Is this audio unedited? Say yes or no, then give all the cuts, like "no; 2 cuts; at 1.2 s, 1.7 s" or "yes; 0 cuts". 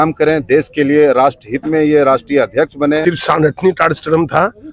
no; 1 cut; at 3.0 s